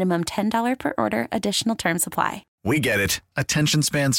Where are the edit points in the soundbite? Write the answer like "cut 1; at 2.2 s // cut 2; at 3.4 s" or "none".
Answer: cut 1; at 2.5 s